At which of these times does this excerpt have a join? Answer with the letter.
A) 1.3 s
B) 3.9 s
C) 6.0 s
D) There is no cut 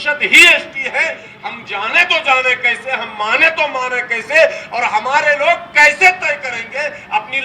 A